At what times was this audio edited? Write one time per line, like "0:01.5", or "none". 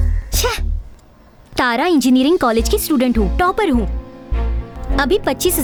none